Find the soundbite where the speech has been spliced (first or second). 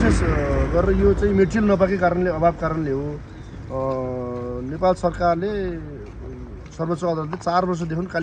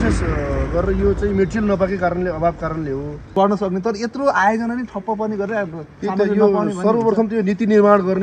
second